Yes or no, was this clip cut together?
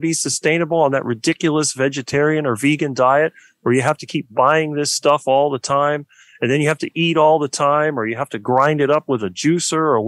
no